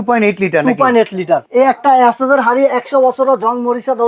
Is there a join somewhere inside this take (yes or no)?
yes